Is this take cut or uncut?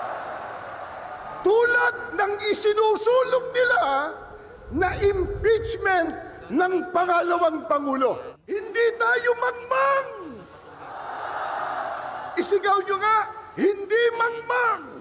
cut